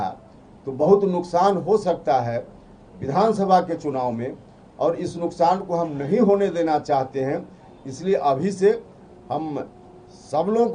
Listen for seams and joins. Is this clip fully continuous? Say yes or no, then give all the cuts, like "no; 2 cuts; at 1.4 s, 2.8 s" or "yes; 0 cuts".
yes; 0 cuts